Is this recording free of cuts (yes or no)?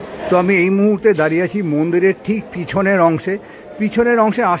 yes